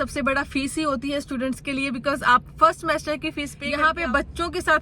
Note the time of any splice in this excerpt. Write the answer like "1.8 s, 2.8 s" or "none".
3.6 s